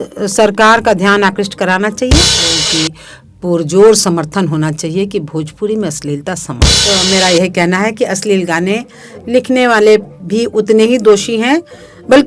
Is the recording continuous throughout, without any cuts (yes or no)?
no